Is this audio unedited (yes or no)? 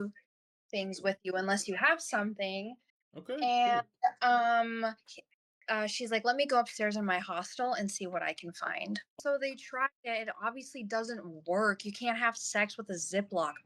no